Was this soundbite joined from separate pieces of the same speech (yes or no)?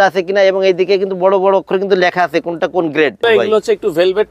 yes